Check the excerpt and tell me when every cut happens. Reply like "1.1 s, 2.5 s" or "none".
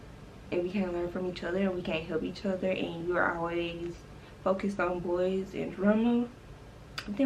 none

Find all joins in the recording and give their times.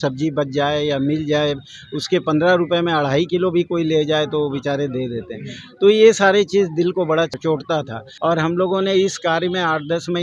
7.9 s

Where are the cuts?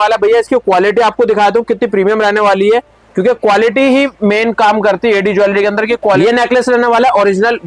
6.2 s

